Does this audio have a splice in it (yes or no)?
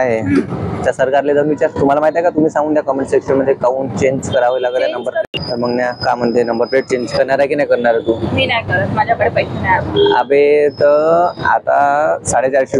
yes